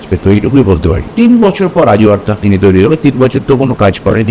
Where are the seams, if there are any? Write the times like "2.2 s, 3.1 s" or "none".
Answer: 1.1 s